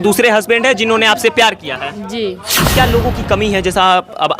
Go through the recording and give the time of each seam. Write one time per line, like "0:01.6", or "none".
0:02.7